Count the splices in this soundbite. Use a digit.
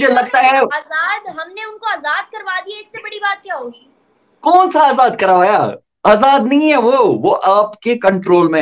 0